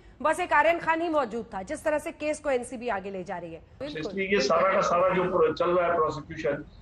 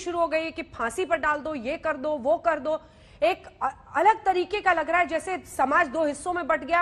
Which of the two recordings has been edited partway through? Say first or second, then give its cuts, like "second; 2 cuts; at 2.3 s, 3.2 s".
first; 1 cut; at 3.9 s